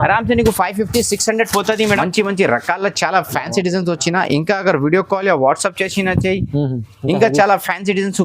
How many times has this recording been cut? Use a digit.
1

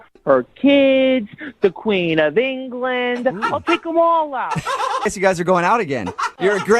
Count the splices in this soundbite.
1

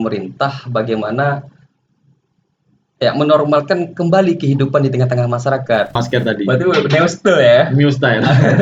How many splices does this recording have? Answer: 1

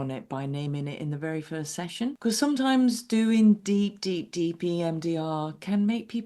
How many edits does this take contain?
1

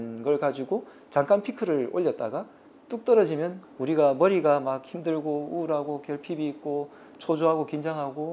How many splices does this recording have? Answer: 1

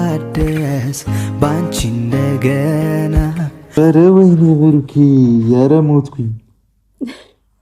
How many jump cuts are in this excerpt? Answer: 1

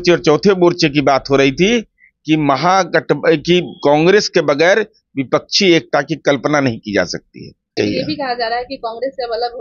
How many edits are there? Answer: 1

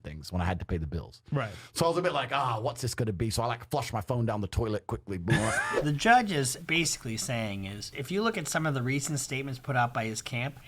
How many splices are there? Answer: 1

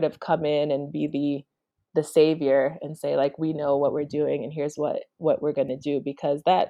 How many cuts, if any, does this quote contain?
0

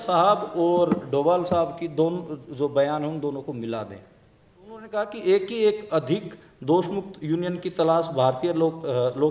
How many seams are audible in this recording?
1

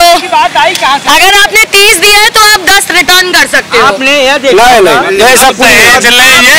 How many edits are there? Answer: 0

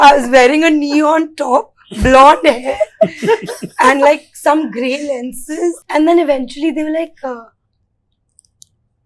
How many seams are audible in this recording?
1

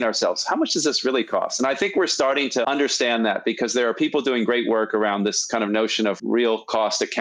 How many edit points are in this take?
0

